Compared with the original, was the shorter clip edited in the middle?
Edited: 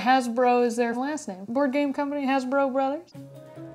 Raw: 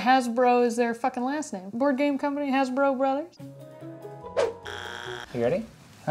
yes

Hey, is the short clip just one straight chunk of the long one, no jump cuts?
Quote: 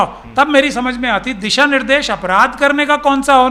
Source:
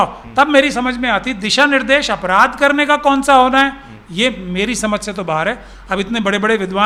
yes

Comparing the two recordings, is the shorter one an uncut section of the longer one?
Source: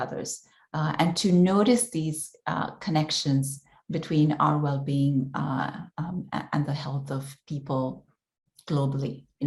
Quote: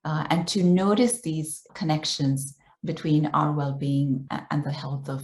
no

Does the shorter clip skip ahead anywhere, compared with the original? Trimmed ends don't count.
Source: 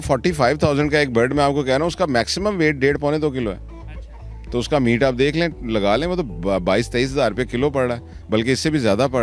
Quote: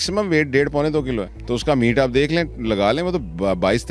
yes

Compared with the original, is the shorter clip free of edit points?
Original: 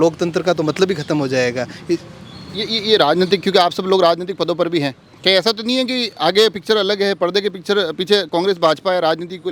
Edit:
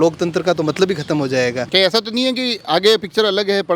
no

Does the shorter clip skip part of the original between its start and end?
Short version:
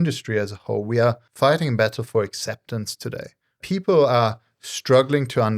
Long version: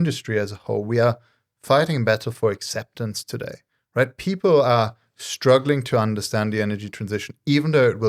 yes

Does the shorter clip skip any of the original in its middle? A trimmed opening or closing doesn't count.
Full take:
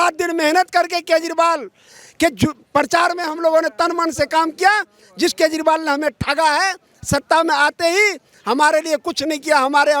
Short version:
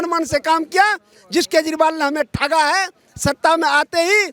no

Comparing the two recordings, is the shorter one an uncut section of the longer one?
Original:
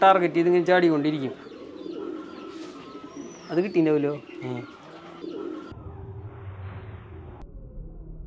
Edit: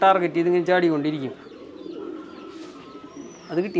yes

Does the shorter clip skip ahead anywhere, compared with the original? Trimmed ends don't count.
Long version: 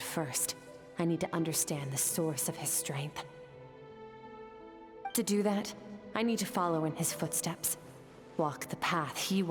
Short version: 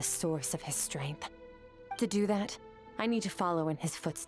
yes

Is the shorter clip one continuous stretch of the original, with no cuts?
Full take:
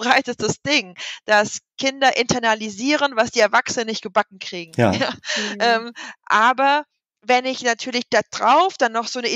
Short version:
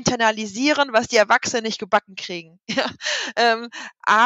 yes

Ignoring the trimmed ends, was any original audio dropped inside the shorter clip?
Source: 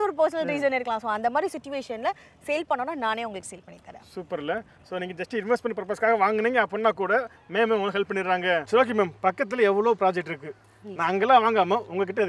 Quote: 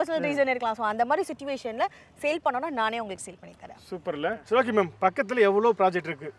yes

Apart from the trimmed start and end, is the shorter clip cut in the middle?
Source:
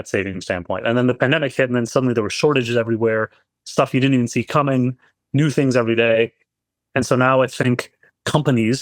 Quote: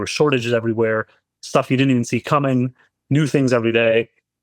no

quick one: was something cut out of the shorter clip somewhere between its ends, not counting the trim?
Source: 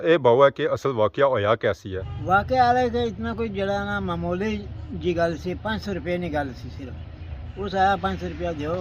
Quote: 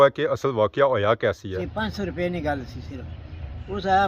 yes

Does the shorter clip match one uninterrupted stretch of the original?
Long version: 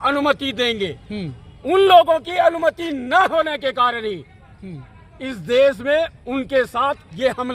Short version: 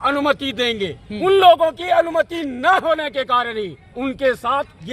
no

